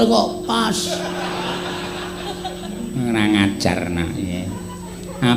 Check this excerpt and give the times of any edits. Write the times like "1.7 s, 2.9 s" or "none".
none